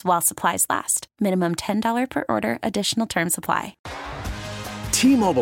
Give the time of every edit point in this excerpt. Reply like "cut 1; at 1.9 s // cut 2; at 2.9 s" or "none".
cut 1; at 3.8 s

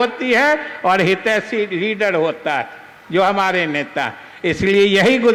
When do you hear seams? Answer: none

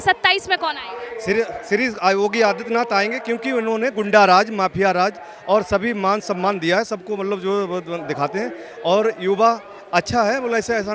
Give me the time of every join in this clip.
none

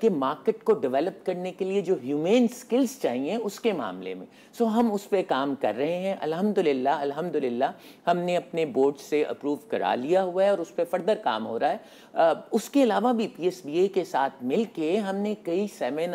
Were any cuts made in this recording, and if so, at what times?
none

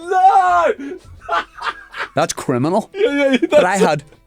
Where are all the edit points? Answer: cut 1; at 2.1 s

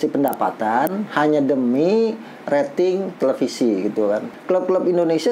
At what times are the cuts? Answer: cut 1; at 4.3 s

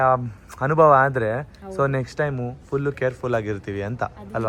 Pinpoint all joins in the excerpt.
none

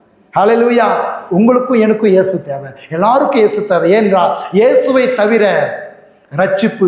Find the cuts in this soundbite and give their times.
none

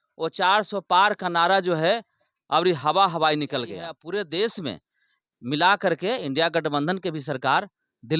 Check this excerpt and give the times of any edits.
cut 1; at 4.0 s

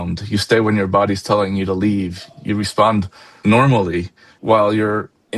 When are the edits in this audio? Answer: cut 1; at 3.2 s

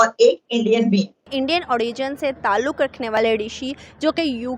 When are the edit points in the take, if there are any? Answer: cut 1; at 1.3 s

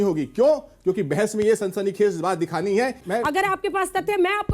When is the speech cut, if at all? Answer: cut 1; at 3.0 s

